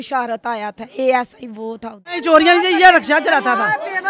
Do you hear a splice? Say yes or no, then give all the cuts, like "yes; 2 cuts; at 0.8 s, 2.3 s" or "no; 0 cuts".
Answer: yes; 1 cut; at 2.1 s